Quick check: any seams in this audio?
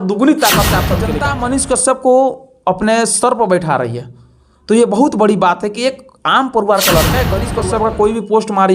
yes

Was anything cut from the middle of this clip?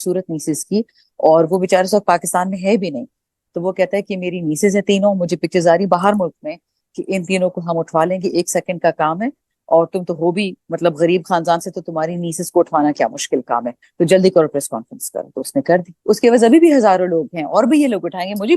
yes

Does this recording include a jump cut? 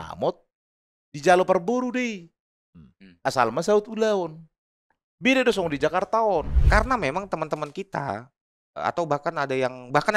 yes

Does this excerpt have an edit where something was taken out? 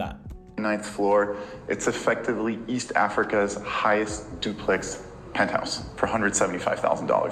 no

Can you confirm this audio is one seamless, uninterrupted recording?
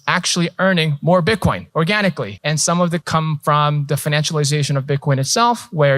no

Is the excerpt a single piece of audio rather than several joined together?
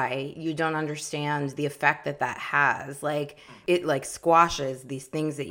yes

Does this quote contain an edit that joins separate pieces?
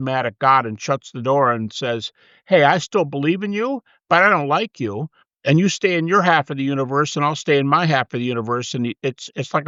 no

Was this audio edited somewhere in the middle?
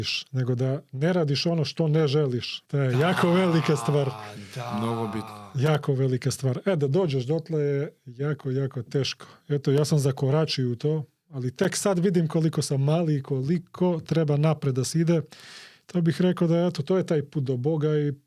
yes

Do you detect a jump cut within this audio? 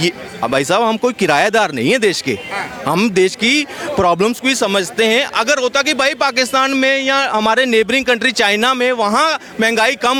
no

